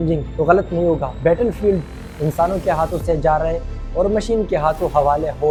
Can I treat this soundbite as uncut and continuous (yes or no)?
yes